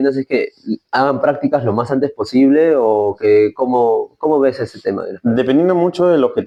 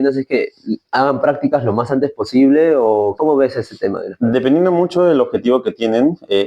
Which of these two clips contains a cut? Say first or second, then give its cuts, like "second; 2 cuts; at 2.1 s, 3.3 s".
second; 1 cut; at 3.1 s